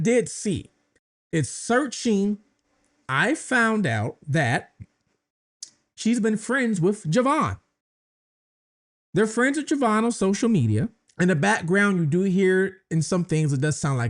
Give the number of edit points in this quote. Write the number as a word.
one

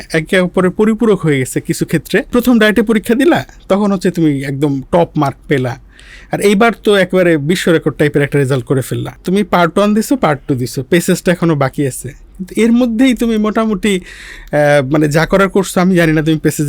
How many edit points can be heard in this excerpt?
two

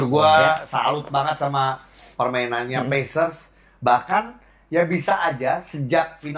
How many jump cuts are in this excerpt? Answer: zero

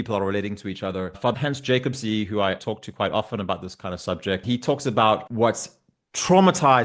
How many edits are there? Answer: four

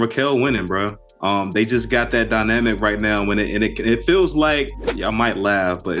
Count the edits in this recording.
zero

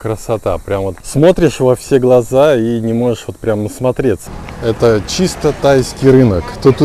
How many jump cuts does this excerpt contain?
two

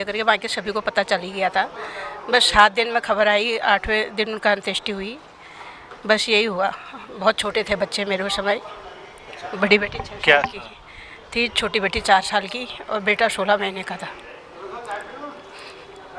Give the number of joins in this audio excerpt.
zero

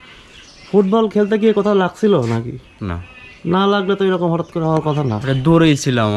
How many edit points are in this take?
zero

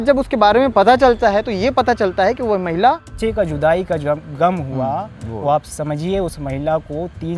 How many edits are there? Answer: one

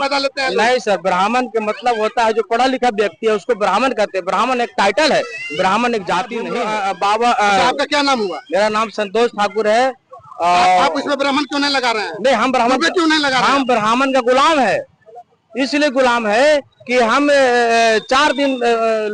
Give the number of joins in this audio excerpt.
one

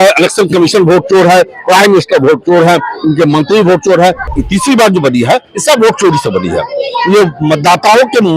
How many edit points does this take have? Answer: one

